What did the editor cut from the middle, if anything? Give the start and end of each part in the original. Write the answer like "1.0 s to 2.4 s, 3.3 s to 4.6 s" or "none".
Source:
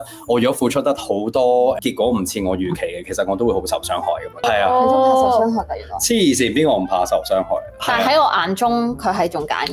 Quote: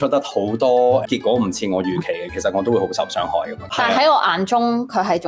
4.3 s to 7.7 s